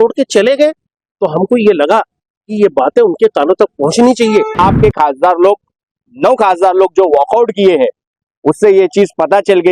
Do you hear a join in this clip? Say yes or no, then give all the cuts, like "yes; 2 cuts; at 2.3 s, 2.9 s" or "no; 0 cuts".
yes; 1 cut; at 4.6 s